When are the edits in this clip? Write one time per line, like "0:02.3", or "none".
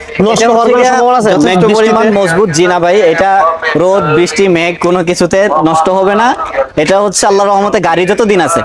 none